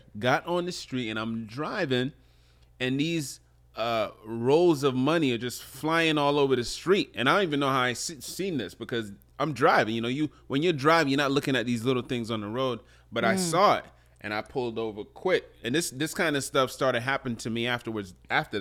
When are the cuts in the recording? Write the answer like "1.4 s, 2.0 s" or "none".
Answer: none